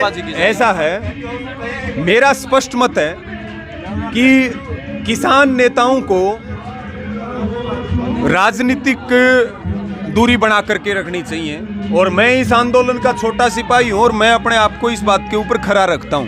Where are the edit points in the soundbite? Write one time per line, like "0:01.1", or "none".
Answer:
none